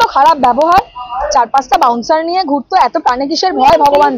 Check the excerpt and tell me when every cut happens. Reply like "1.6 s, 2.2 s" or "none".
none